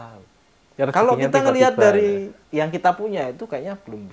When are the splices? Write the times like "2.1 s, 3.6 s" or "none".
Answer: 2.4 s